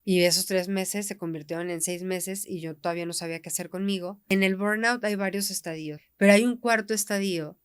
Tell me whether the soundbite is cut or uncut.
cut